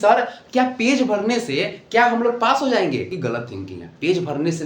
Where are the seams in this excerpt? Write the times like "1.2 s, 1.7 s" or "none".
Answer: 3.1 s